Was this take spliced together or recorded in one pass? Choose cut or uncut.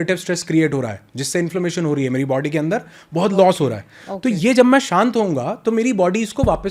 uncut